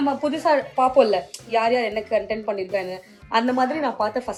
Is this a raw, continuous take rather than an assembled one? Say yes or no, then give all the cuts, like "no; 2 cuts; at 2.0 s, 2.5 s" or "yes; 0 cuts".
yes; 0 cuts